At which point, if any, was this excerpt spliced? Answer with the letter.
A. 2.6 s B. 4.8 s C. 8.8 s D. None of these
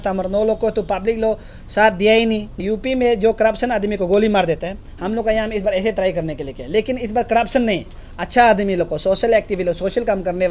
A